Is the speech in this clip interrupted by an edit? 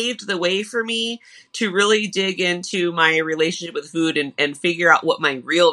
no; 0 cuts

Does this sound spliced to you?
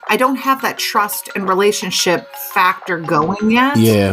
yes; 1 cut; at 2.2 s

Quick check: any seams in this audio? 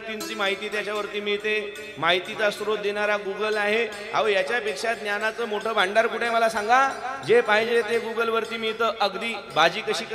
no; 0 cuts

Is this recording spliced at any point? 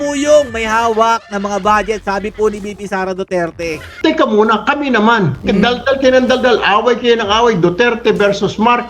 yes; 1 cut; at 3.9 s

